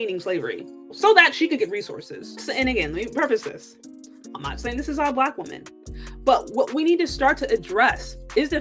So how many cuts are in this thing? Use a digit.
2